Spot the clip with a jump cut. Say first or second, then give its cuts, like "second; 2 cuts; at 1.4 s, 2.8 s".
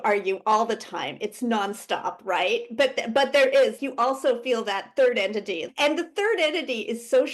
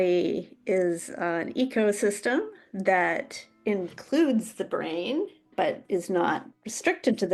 first; 2 cuts; at 3.8 s, 5.7 s